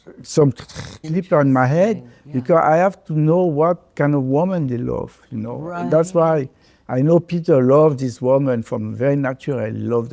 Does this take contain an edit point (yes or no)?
yes